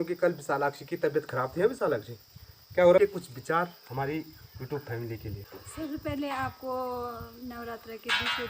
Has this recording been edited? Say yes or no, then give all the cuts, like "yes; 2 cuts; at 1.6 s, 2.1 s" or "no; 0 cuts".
yes; 2 cuts; at 3.0 s, 5.5 s